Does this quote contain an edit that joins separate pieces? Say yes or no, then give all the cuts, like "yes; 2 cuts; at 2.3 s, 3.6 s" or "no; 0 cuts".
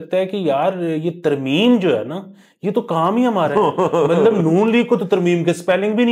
no; 0 cuts